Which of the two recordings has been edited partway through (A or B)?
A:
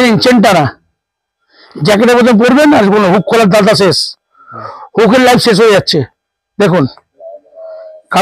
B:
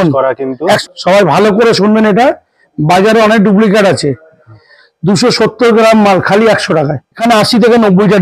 B